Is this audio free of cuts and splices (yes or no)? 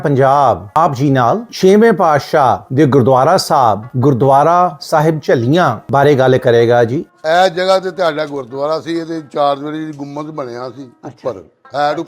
no